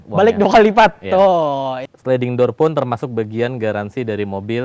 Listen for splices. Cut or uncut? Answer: cut